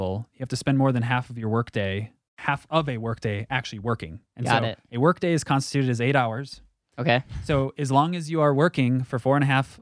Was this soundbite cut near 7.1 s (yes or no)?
no